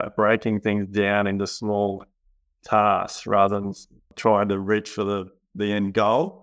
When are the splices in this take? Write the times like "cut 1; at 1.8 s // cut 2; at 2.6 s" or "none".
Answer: cut 1; at 4.1 s